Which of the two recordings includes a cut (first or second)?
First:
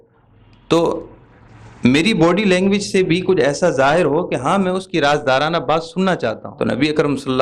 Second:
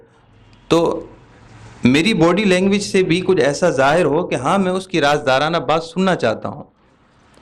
first